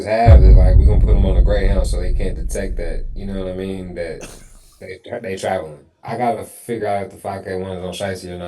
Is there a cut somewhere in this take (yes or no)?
yes